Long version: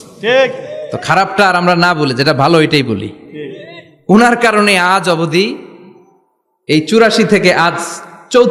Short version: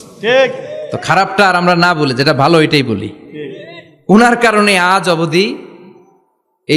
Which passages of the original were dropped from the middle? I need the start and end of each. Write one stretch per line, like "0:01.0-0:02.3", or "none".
none